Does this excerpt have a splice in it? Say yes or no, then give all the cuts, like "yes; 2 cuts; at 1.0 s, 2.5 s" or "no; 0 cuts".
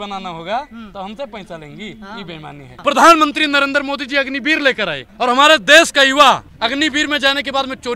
yes; 3 cuts; at 2.6 s, 5.0 s, 6.5 s